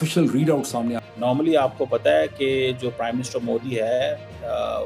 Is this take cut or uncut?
cut